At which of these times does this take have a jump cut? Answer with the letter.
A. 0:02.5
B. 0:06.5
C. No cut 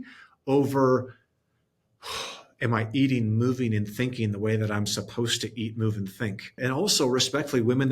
B